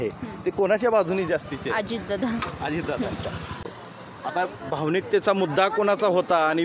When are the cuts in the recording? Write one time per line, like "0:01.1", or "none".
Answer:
0:03.6